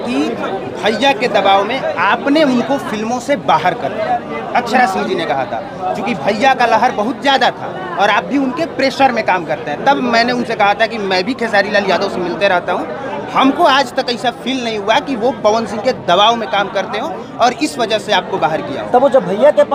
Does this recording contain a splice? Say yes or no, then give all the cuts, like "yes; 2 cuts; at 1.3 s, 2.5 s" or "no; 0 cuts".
no; 0 cuts